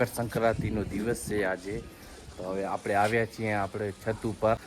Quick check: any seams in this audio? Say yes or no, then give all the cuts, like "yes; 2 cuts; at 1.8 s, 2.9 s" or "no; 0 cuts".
no; 0 cuts